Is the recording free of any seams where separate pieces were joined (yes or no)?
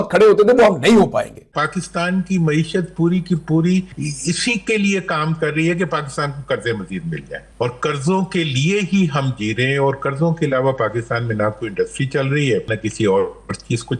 no